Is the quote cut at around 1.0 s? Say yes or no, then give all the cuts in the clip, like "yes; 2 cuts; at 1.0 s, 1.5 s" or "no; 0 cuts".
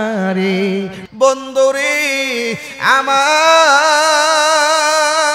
yes; 1 cut; at 1.0 s